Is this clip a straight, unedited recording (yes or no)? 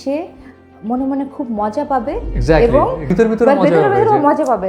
no